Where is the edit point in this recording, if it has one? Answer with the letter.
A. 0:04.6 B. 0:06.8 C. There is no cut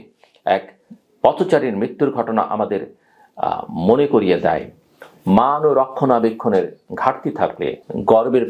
C